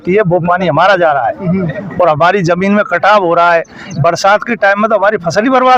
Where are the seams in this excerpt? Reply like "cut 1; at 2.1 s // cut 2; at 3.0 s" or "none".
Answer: none